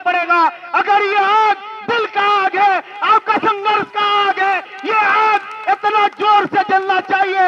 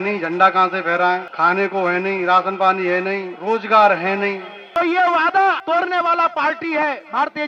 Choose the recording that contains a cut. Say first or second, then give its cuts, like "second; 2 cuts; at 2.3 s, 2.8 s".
second; 4 cuts; at 1.3 s, 3.3 s, 4.5 s, 5.6 s